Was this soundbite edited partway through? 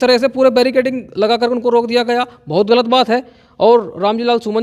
no; 0 cuts

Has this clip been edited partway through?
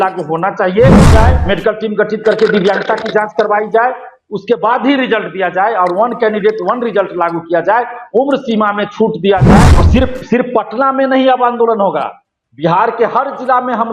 yes; 2 cuts; at 1.1 s, 9.7 s

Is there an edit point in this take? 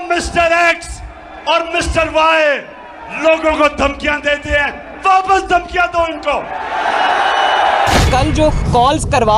yes; 1 cut; at 8.0 s

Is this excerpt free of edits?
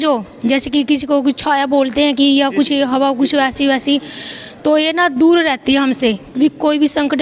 yes; 0 cuts

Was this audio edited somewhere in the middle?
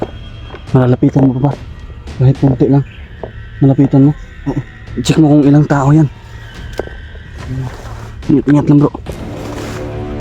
yes; 1 cut; at 9.3 s

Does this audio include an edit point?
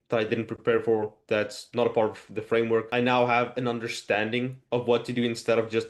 no; 0 cuts

